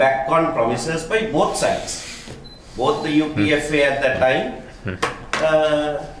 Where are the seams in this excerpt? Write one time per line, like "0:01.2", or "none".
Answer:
none